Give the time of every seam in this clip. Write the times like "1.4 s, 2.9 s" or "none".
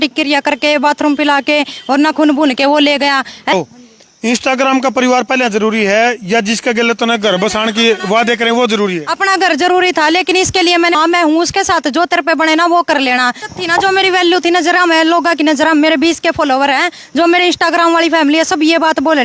3.5 s, 10.9 s, 13.4 s